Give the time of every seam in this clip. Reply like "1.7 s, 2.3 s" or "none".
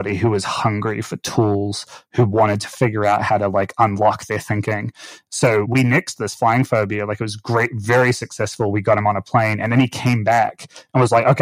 5.7 s